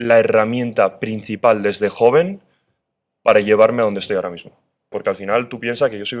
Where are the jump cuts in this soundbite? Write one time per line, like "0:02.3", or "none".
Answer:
0:05.0